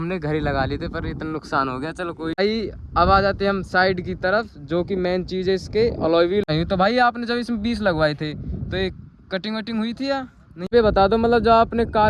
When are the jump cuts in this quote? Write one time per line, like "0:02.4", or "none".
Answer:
0:02.4
0:06.4
0:10.7